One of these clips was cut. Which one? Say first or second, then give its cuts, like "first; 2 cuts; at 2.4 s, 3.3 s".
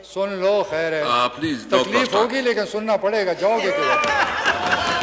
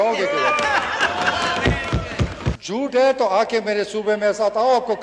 second; 1 cut; at 2.6 s